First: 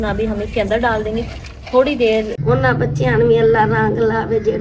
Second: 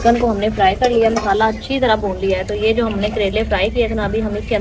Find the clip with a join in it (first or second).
first